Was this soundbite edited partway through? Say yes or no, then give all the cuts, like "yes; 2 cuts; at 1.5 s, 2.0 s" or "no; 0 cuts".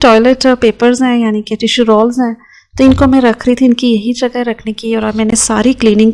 no; 0 cuts